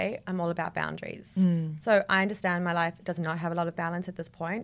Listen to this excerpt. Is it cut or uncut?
uncut